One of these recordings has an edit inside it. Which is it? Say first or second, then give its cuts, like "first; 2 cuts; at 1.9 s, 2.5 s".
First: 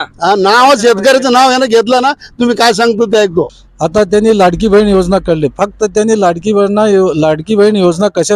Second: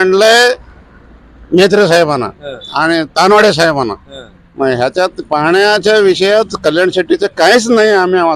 first; 1 cut; at 3.6 s